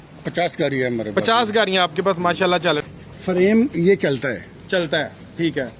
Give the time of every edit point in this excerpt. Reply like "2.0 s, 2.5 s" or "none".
2.8 s